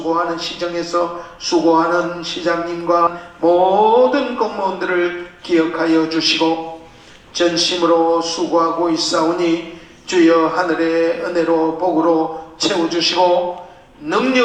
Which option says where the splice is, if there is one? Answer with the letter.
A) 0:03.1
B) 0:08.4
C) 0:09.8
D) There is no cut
A